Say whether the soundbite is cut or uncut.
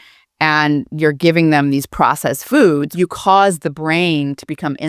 cut